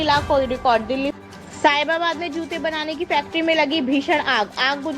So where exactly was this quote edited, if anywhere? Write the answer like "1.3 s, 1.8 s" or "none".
1.1 s